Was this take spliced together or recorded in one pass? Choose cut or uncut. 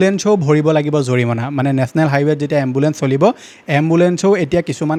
uncut